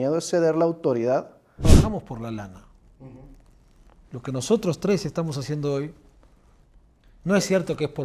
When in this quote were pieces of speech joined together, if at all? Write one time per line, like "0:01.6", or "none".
0:01.6

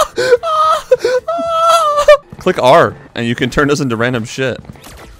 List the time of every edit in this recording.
0:02.3

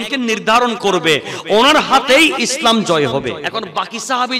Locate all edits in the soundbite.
0:03.4

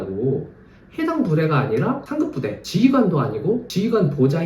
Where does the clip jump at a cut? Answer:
0:02.3
0:03.7

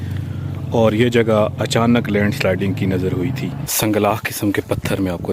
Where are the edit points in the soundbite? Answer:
0:03.7

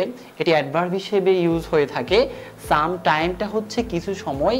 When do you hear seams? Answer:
none

